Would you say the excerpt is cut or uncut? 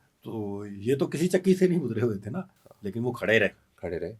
uncut